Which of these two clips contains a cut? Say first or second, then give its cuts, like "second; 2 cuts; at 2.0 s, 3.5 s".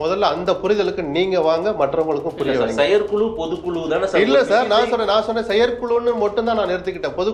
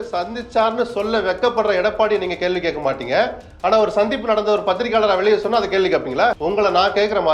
second; 1 cut; at 6.4 s